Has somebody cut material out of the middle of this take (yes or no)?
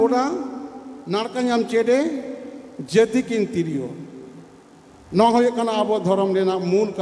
no